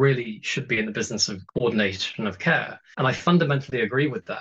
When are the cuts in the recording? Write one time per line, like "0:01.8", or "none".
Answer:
0:01.4
0:02.8

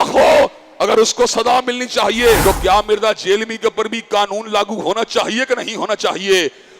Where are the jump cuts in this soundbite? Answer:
0:02.4

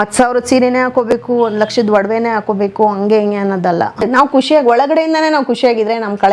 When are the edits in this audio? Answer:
0:04.0

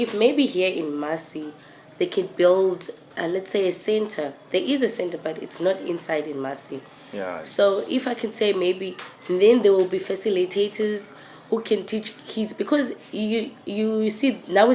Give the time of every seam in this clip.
none

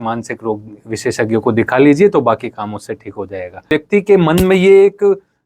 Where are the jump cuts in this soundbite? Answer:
0:03.7

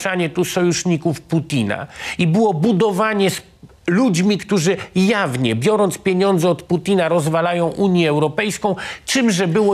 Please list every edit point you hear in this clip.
none

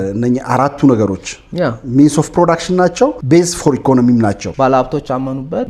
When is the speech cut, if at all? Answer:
0:03.2
0:04.5

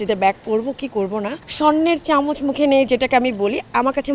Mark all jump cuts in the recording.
0:01.4

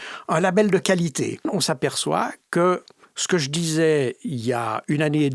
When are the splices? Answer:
0:01.5

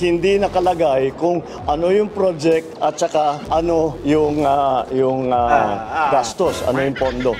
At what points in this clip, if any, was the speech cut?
none

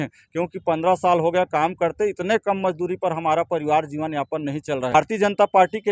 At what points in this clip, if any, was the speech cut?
0:04.9

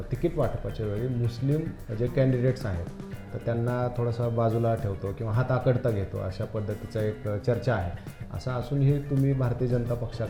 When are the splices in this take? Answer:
none

